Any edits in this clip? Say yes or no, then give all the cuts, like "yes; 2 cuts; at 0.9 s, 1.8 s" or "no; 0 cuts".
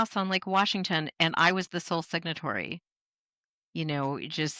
no; 0 cuts